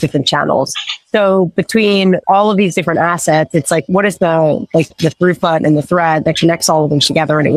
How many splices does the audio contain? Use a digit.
3